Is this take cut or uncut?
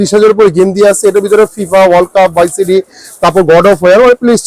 uncut